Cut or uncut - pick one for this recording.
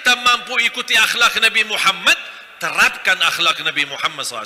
uncut